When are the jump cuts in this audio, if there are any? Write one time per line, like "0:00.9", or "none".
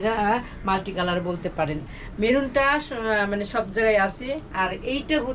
none